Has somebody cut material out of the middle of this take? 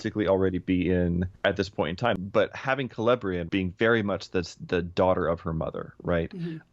yes; 3 cuts; at 1.3 s, 2.2 s, 3.4 s

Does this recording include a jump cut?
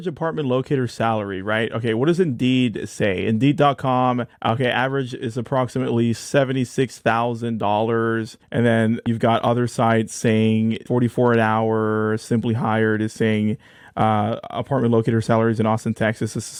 no; 0 cuts

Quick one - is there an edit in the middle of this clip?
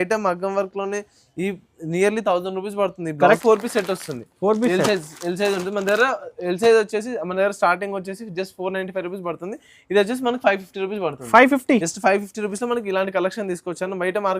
yes; 1 cut; at 3.4 s

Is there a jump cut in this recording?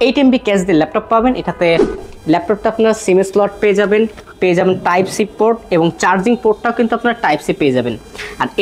yes; 1 cut; at 2.1 s

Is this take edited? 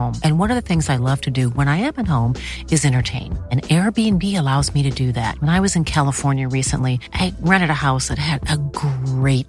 no; 0 cuts

